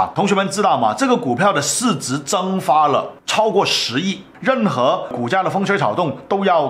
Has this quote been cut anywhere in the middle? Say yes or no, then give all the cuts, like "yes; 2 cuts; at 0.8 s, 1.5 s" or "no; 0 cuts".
yes; 1 cut; at 4.3 s